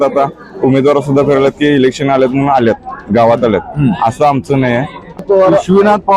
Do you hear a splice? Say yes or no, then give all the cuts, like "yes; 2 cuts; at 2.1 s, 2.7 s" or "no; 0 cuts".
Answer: yes; 1 cut; at 5.2 s